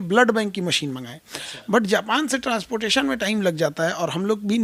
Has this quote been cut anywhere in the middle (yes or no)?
no